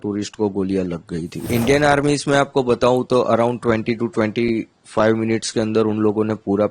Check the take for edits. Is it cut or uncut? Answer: cut